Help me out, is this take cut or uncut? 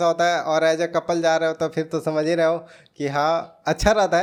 uncut